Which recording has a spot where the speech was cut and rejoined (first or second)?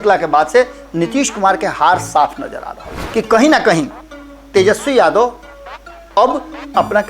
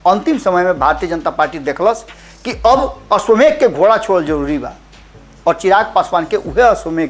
first